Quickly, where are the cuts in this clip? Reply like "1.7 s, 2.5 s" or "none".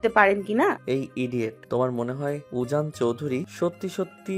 1.2 s, 2.4 s, 3.5 s